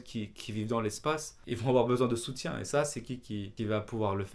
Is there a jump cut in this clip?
yes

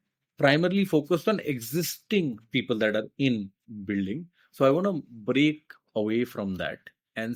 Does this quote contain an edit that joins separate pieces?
no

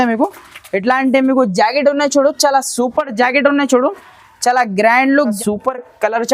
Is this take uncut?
no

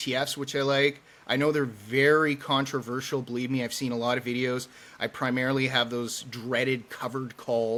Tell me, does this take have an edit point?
no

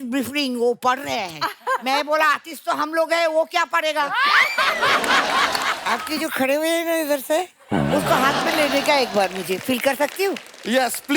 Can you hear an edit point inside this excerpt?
yes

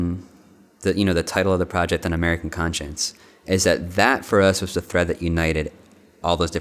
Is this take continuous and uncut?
yes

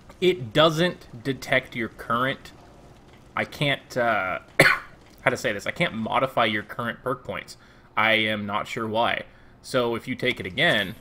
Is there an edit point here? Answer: no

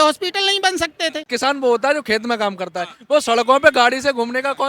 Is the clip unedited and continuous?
no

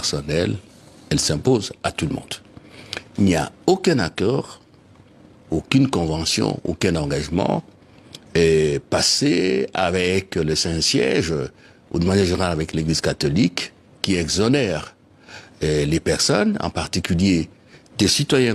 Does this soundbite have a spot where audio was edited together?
no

